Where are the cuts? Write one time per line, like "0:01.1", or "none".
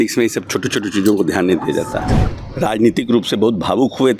0:02.2